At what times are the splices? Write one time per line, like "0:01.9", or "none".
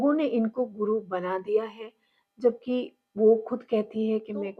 none